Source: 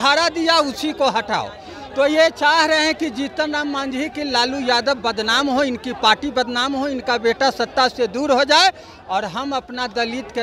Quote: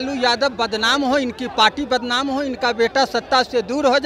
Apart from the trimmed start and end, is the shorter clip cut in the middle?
no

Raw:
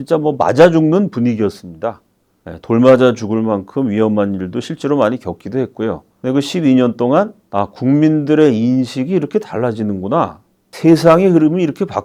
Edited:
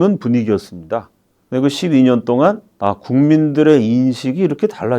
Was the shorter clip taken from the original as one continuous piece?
no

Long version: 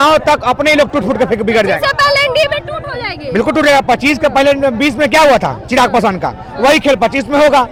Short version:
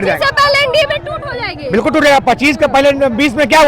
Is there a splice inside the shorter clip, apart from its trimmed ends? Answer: no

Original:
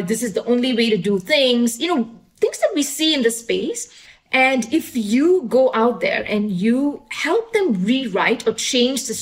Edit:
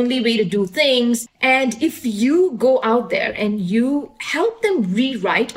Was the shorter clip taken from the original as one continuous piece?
no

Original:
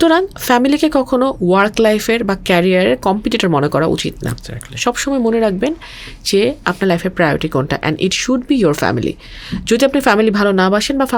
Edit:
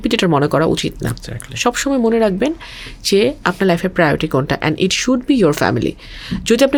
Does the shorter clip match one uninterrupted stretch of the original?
yes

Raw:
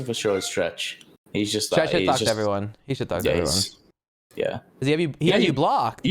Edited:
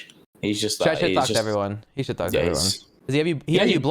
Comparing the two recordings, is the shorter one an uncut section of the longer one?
no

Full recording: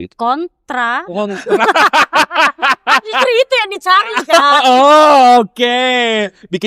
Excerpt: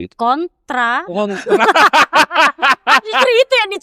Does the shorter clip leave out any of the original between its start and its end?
no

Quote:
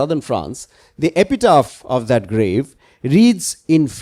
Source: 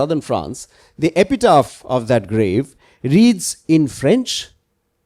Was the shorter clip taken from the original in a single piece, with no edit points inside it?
yes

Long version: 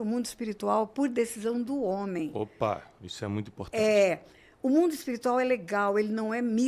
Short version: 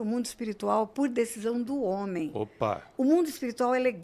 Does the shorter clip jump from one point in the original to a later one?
yes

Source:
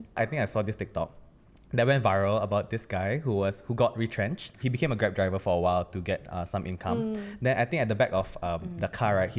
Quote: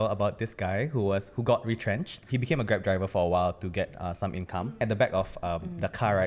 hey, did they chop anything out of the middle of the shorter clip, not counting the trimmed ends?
yes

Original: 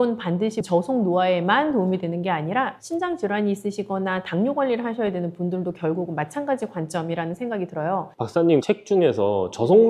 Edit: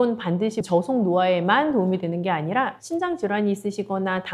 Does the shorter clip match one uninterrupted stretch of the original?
yes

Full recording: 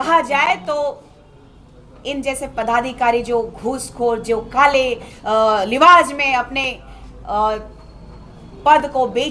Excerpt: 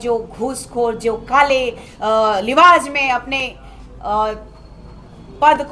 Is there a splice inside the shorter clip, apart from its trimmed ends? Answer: no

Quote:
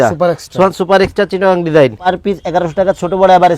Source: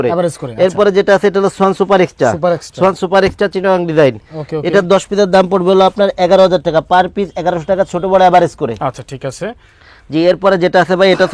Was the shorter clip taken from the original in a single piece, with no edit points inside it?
no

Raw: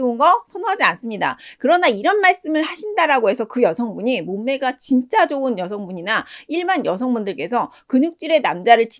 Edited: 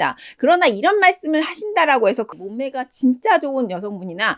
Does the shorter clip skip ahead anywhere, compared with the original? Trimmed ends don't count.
yes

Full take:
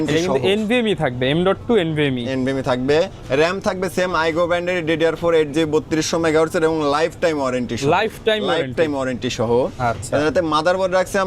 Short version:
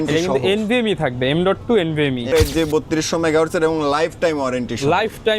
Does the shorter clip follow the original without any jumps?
no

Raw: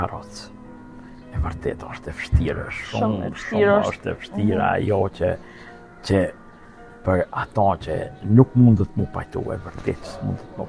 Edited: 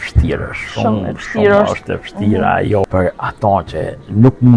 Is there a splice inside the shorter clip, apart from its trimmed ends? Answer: yes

